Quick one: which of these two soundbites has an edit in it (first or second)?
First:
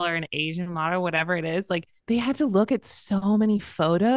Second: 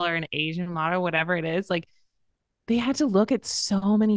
first